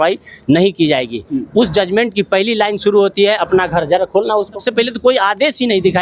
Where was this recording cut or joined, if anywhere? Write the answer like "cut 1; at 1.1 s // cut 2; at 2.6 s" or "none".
cut 1; at 4.7 s